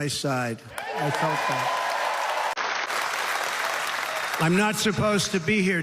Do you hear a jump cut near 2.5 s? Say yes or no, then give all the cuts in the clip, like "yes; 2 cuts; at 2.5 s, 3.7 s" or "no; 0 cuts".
yes; 1 cut; at 2.5 s